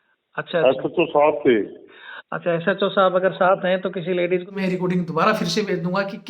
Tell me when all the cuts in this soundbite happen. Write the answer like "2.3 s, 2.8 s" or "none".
4.5 s